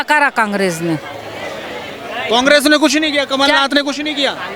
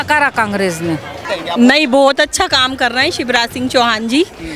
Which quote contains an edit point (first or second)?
second